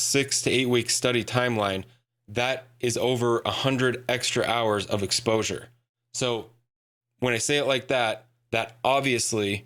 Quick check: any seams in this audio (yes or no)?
no